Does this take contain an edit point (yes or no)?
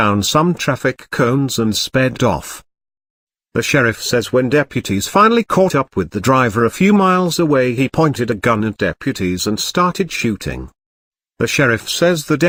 no